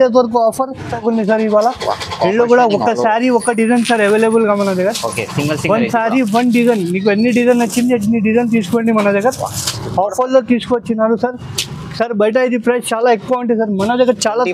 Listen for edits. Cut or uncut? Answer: cut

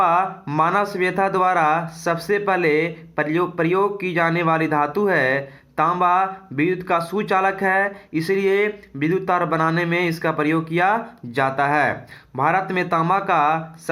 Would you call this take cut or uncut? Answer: uncut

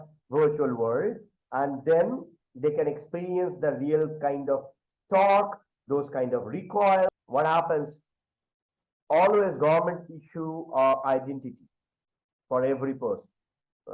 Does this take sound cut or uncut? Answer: cut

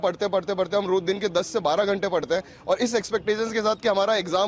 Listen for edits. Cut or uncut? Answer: uncut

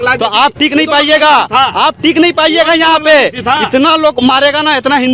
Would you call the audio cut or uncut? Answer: uncut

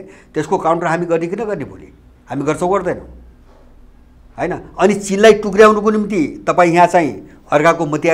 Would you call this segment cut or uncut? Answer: uncut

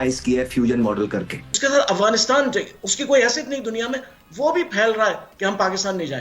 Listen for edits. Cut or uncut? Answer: cut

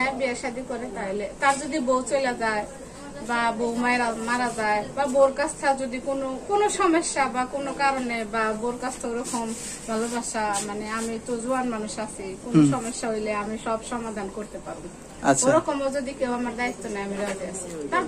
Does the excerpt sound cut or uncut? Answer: uncut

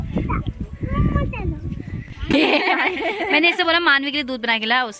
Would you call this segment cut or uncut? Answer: cut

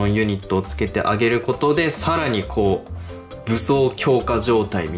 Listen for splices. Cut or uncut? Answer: uncut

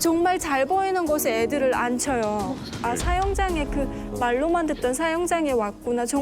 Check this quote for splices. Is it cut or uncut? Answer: cut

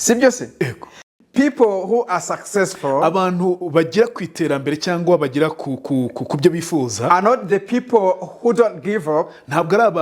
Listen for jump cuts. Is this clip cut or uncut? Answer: cut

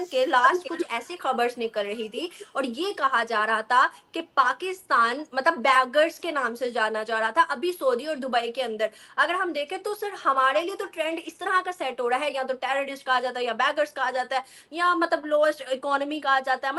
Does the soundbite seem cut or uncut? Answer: uncut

